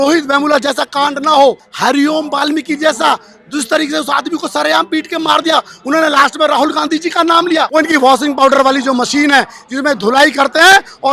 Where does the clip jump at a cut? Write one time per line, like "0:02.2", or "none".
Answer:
0:01.7
0:07.7